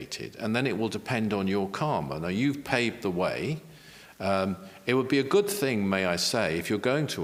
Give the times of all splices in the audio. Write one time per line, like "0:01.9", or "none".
none